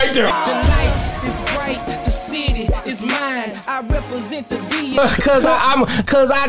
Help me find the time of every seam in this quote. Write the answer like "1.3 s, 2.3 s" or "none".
4.9 s